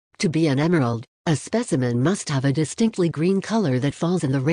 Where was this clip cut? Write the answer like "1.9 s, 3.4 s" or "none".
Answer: 1.1 s